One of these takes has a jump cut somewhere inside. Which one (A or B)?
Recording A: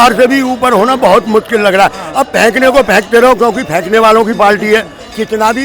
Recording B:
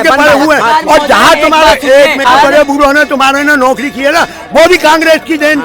B